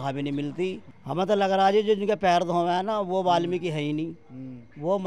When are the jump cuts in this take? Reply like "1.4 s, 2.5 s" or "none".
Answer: 0.9 s